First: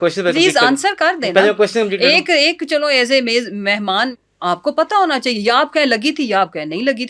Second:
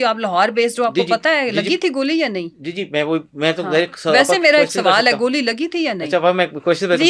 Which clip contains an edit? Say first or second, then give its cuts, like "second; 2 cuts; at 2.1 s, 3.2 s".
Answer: first; 1 cut; at 4.1 s